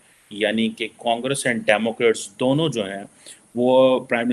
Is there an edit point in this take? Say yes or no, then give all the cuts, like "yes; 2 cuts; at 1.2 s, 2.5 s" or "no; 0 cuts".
no; 0 cuts